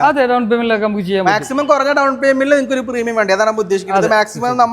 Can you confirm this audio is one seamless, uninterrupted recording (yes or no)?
yes